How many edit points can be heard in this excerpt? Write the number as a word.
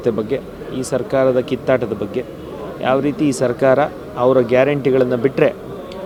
zero